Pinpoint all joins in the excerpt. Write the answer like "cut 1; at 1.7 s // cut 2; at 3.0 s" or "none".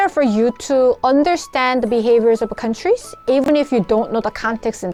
none